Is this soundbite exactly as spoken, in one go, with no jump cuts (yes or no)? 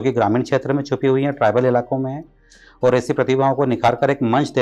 yes